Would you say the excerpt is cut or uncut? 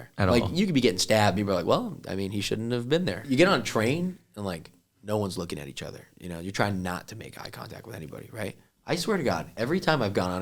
cut